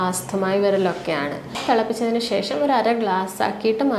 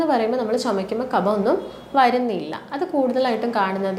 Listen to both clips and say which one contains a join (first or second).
first